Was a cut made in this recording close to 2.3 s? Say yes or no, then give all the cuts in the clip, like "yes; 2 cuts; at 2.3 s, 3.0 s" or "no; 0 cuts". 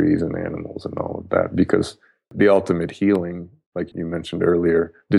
yes; 2 cuts; at 2.3 s, 3.9 s